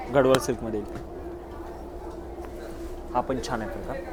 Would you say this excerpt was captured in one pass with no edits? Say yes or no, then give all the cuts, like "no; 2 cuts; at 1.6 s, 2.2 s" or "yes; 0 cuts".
yes; 0 cuts